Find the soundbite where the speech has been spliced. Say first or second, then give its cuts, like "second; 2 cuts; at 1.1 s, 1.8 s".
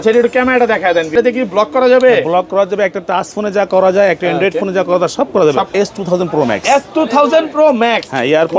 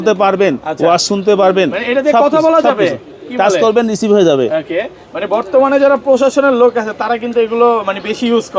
first; 2 cuts; at 1.1 s, 5.7 s